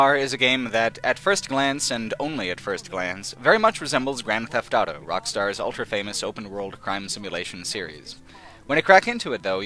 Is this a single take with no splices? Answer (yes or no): yes